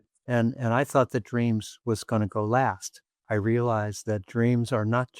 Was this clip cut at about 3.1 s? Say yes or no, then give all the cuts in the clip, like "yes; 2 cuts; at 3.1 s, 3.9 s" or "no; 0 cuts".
yes; 1 cut; at 3.1 s